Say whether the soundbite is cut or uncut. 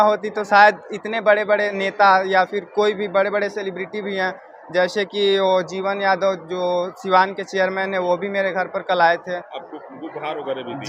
uncut